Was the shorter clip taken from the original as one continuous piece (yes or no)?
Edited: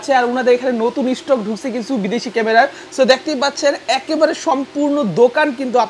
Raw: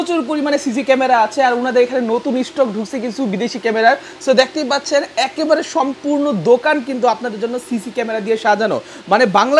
yes